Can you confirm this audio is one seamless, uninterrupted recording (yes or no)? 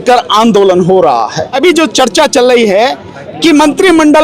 no